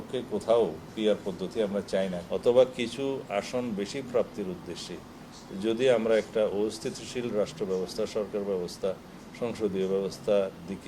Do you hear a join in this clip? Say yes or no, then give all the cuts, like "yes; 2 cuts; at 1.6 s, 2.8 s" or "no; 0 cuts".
yes; 1 cut; at 2.2 s